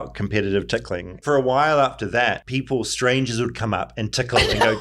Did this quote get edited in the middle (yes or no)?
yes